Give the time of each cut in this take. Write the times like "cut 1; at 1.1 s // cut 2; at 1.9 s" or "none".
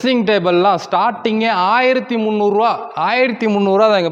none